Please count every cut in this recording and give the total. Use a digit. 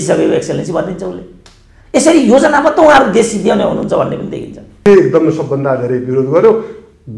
1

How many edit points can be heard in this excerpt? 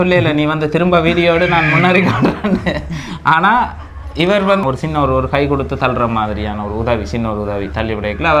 1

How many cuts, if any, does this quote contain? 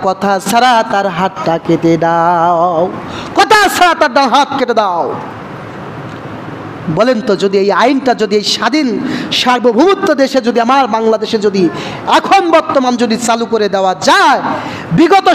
0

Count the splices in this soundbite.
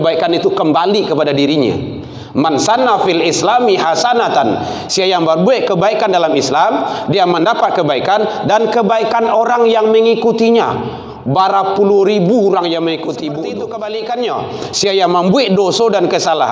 1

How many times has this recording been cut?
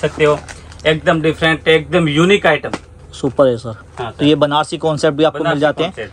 0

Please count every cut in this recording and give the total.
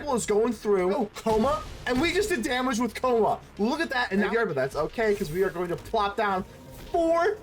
2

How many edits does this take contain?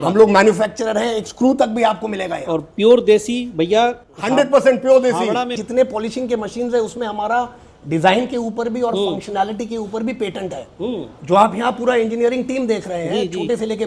1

